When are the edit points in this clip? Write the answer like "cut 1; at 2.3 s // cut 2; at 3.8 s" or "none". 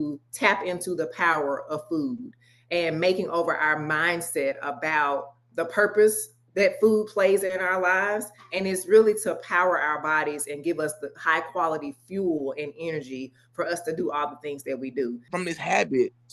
cut 1; at 15.2 s